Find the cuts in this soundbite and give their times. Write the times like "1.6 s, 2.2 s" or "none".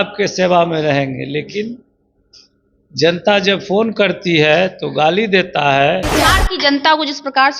6.1 s